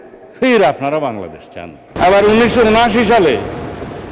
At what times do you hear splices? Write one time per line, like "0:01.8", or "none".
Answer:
0:01.9